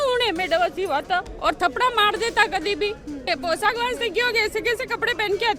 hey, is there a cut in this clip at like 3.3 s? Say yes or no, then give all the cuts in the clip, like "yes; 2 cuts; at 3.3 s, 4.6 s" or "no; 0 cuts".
yes; 1 cut; at 3.3 s